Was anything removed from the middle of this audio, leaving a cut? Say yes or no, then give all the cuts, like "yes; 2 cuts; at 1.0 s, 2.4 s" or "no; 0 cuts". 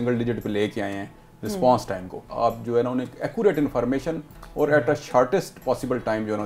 yes; 1 cut; at 2.3 s